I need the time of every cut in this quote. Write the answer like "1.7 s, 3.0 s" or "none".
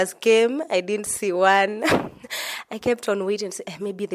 none